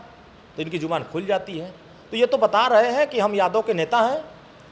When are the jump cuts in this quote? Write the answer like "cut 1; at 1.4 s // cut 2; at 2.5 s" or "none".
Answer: none